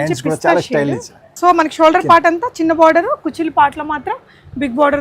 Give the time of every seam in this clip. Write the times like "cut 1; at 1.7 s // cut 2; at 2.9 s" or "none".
cut 1; at 1.3 s